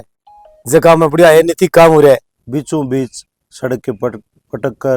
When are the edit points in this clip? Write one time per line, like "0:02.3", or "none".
0:02.3